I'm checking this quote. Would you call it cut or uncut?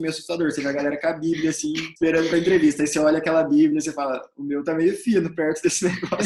cut